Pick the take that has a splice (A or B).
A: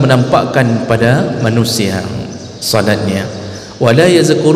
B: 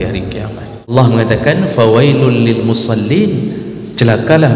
B